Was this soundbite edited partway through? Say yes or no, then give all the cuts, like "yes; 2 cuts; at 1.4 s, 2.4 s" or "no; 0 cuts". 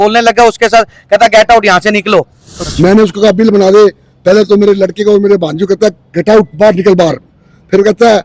yes; 1 cut; at 2.4 s